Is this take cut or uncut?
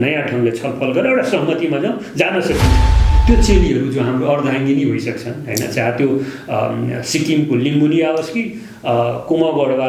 cut